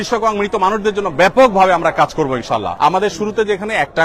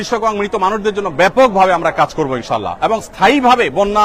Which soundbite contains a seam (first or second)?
first